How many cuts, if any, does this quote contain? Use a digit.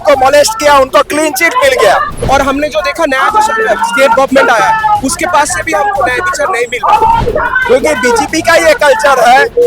2